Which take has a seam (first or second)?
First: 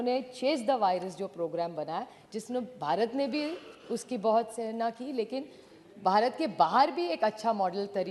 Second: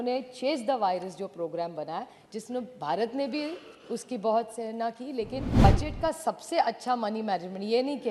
second